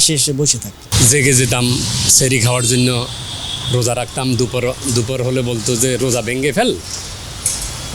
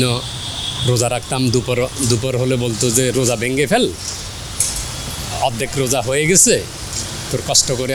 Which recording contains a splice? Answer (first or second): first